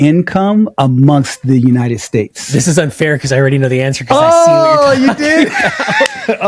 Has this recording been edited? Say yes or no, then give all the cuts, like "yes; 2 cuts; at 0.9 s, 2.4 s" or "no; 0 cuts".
no; 0 cuts